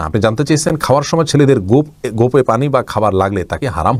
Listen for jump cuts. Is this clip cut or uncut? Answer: uncut